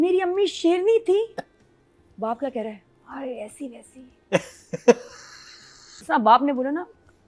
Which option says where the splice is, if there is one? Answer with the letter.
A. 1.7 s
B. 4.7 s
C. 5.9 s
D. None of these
C